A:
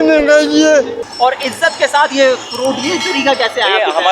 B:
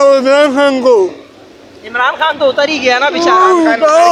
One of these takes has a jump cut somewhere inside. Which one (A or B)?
A